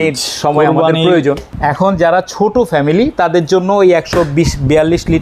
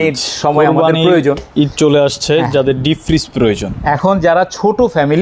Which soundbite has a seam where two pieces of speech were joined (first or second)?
first